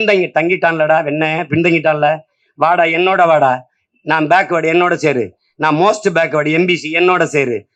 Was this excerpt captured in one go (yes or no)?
yes